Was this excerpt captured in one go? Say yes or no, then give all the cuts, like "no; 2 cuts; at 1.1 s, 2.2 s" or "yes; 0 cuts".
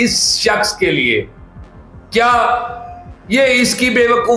yes; 0 cuts